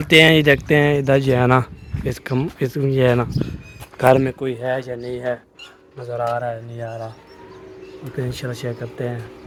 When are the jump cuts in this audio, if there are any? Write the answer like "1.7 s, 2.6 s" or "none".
none